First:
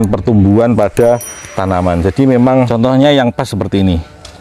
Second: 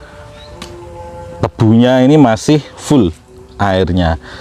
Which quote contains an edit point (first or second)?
first